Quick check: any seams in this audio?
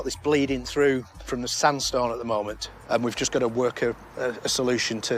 no; 0 cuts

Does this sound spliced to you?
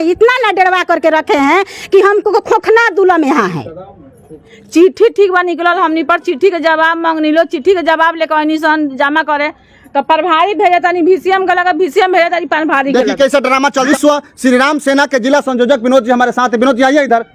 no; 0 cuts

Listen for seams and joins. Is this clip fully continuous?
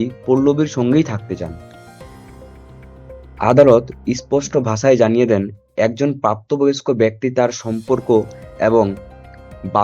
no; 2 cuts; at 1.6 s, 3.0 s

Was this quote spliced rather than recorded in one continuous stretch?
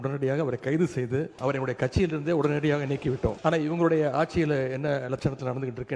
yes; 2 cuts; at 1.3 s, 3.4 s

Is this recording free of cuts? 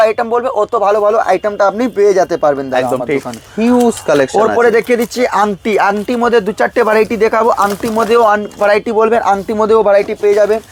yes; 0 cuts

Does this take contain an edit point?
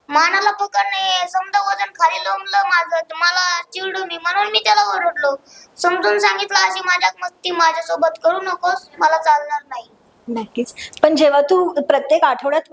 no; 0 cuts

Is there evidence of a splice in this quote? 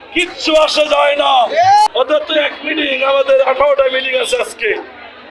yes; 1 cut; at 1.9 s

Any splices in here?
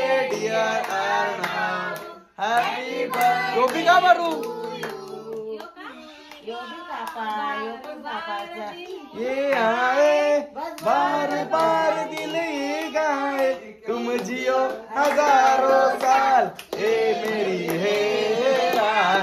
no; 0 cuts

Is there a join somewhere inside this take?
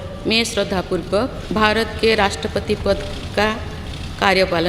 yes; 1 cut; at 1.4 s

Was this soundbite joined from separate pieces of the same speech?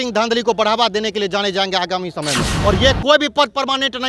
yes; 1 cut; at 2.5 s

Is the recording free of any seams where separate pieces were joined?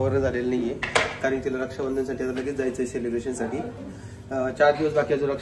yes; 0 cuts

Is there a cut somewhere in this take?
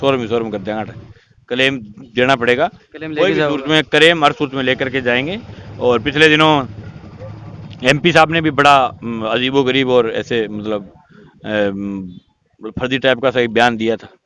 no; 0 cuts

